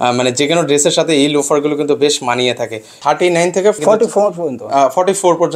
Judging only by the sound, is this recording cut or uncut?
cut